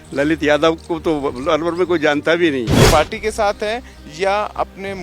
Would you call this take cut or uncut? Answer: cut